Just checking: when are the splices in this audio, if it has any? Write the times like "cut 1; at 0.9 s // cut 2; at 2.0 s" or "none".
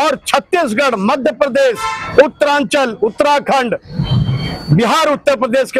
none